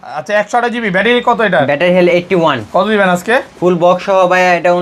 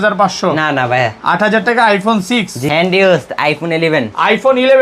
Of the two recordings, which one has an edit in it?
second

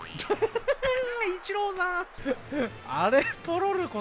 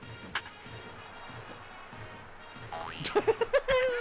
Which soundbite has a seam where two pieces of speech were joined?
first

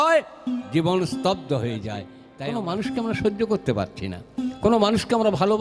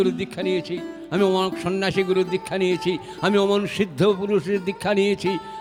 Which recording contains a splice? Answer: first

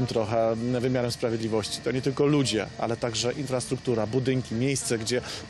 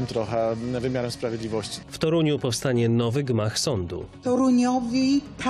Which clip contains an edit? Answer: second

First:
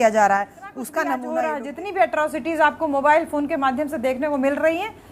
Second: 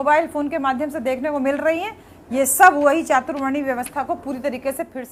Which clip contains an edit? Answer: first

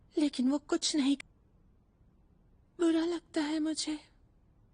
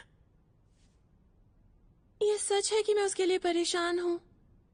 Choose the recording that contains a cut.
first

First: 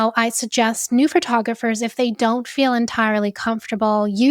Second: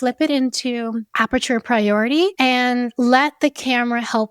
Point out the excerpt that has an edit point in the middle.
second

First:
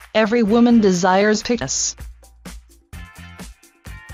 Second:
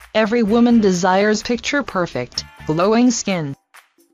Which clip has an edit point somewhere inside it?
second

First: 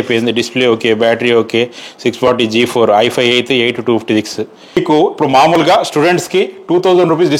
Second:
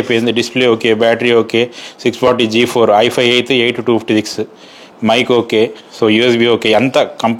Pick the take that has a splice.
first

